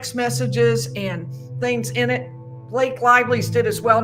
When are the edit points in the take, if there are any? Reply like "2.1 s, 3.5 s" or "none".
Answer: none